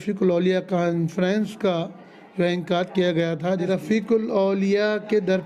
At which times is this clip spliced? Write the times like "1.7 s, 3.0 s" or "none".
3.7 s